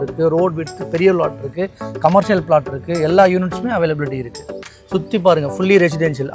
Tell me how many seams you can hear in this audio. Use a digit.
1